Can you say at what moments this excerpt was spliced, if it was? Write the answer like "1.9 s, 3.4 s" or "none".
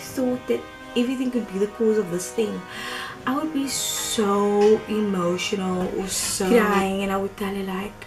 6.5 s